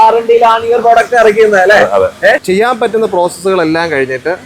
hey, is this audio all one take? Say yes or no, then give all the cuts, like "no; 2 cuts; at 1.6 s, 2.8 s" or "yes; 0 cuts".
no; 1 cut; at 2.4 s